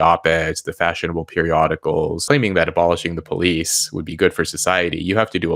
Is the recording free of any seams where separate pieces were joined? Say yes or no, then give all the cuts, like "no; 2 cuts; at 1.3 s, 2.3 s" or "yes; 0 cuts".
no; 1 cut; at 2.2 s